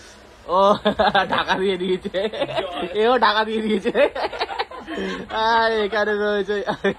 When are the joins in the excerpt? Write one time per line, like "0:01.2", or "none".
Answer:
none

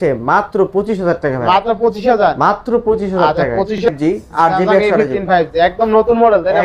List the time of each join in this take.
0:03.9

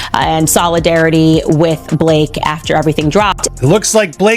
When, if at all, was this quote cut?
0:03.4

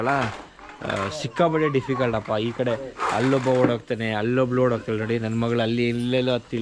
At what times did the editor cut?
none

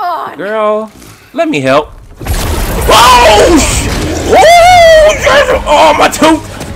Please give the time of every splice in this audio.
none

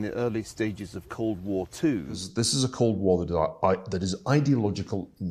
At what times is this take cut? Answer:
0:02.3

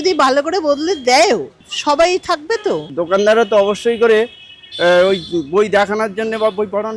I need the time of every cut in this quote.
0:02.9

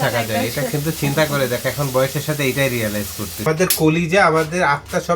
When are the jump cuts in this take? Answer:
0:03.4

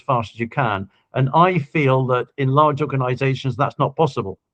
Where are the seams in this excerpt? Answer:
none

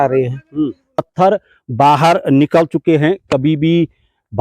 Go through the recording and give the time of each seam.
0:01.0

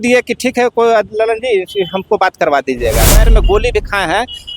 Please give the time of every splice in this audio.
0:03.2

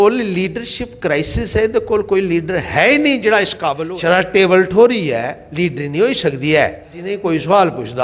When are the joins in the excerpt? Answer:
0:03.8
0:07.1

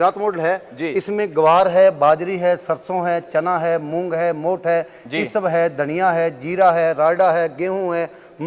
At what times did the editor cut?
none

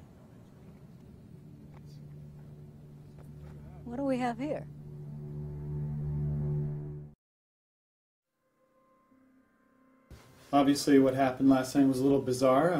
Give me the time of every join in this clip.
0:03.7

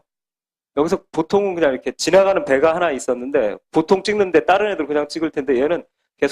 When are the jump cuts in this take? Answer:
0:02.7

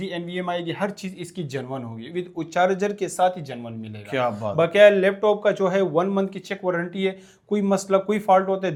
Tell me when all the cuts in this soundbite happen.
none

